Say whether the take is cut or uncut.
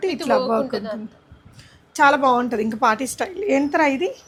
uncut